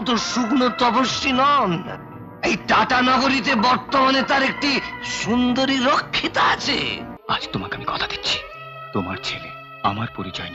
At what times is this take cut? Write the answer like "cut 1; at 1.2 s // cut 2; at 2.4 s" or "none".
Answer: cut 1; at 7.1 s